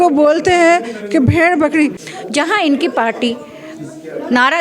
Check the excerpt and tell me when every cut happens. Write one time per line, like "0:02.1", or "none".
0:02.0